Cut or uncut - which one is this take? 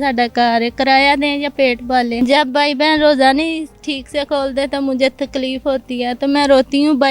cut